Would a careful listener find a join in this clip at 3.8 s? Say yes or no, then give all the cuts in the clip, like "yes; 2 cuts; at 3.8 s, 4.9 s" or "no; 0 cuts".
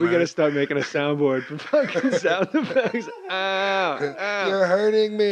no; 0 cuts